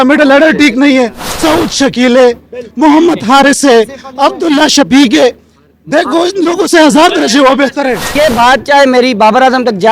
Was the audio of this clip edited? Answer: yes; 2 cuts; at 1.2 s, 8.1 s

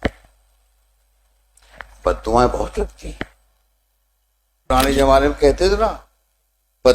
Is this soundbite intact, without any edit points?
no; 1 cut; at 4.7 s

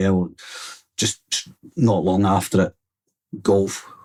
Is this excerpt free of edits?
yes; 0 cuts

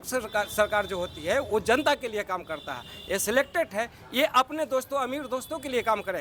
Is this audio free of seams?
yes; 0 cuts

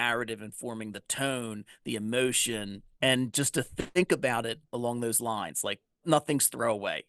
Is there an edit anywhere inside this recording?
yes; 3 cuts; at 2.8 s, 4.6 s, 6.0 s

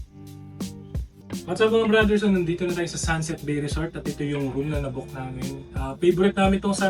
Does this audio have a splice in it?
yes; 1 cut; at 1.1 s

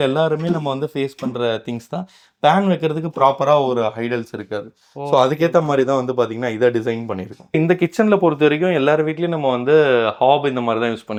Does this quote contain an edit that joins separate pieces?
no; 0 cuts

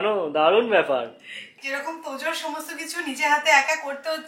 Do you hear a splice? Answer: yes; 1 cut; at 1.5 s

